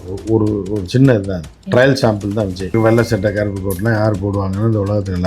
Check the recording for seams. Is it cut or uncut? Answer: cut